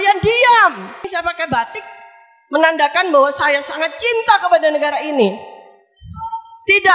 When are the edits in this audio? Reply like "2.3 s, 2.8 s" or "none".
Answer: 1.0 s